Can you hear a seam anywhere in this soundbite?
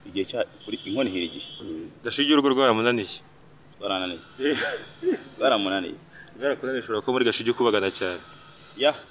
yes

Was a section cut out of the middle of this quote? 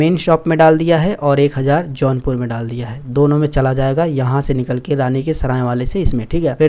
no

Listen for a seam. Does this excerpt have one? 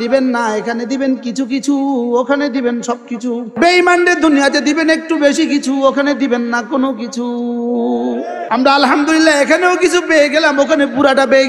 yes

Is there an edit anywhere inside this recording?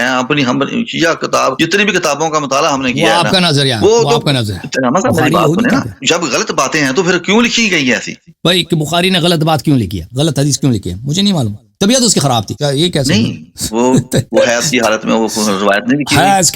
yes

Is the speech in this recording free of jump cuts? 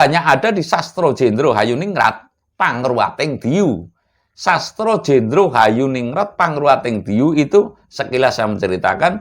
yes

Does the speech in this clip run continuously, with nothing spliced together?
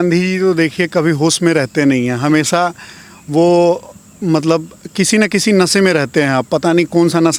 yes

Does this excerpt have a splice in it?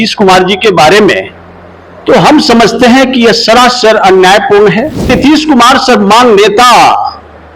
yes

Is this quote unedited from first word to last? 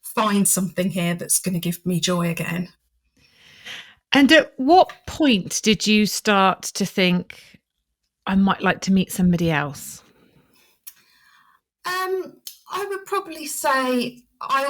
yes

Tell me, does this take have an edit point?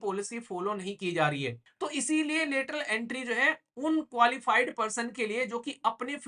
yes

